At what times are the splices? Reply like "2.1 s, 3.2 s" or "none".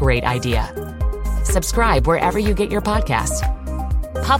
none